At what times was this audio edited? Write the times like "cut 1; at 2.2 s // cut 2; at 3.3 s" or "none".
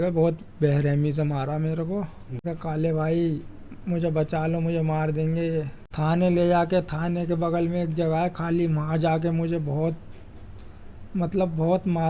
cut 1; at 2.5 s // cut 2; at 5.8 s